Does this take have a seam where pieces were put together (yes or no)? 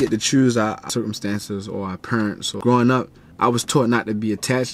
yes